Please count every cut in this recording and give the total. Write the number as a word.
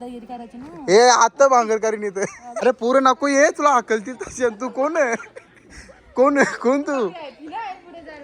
one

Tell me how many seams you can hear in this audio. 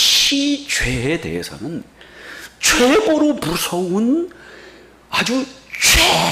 zero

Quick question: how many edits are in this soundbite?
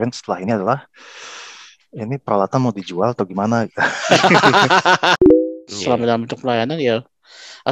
one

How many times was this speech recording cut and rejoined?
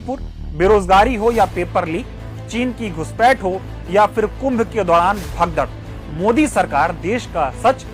zero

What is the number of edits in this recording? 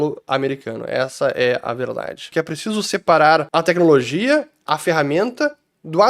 two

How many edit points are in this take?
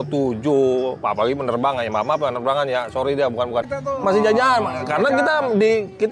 one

